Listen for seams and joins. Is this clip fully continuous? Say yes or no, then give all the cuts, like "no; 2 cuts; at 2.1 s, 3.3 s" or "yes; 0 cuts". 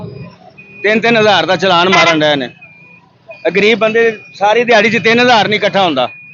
yes; 0 cuts